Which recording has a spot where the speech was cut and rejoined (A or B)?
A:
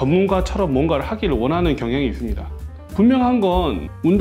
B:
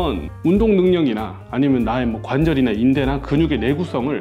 A